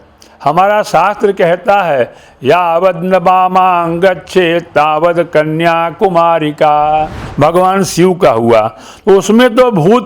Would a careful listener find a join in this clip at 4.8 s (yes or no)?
no